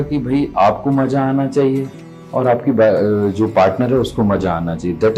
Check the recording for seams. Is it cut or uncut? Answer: uncut